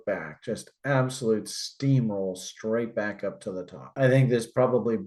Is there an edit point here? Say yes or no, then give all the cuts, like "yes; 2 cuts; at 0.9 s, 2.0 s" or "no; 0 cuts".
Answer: no; 0 cuts